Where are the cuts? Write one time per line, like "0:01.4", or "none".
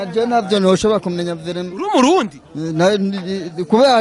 none